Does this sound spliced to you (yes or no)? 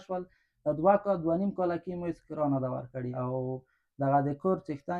yes